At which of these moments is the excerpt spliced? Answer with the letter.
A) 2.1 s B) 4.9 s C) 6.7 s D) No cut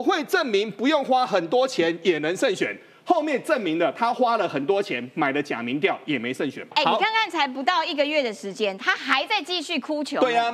C